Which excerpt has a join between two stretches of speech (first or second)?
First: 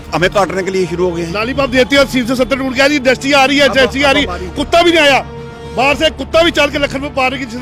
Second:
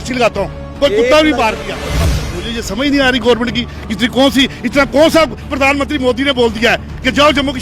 second